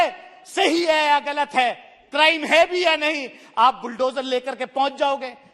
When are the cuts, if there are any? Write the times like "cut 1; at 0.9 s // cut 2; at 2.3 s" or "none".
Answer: none